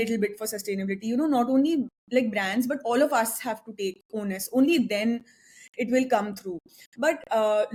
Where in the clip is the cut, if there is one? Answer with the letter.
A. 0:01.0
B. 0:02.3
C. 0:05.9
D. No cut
D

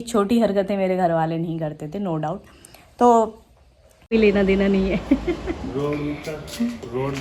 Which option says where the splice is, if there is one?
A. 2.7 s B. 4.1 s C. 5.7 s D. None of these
B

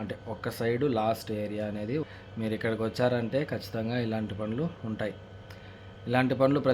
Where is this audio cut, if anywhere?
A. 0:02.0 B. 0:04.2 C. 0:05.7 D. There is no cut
A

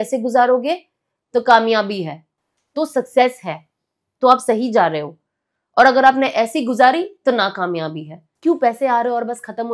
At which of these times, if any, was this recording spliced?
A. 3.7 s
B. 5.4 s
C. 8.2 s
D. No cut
C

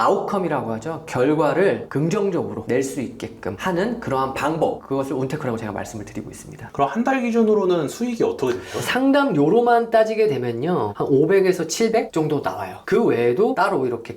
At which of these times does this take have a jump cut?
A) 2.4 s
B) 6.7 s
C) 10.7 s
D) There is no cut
B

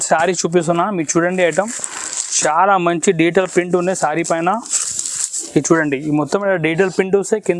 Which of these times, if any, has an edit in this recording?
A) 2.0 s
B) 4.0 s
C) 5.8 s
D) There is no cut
D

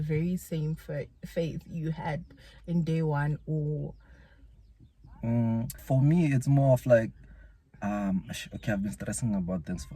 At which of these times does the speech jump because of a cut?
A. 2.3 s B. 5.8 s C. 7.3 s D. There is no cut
B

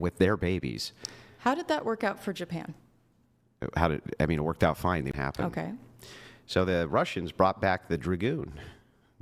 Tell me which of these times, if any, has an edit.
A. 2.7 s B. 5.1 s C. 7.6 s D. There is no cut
B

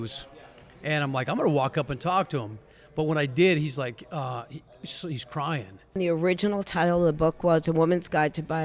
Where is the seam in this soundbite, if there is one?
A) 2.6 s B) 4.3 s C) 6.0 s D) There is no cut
C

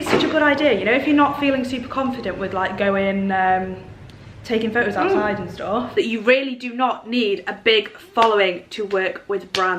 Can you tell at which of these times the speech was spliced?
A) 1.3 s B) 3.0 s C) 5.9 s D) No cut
C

